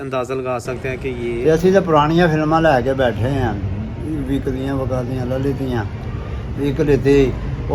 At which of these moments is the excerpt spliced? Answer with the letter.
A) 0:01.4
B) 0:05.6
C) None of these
A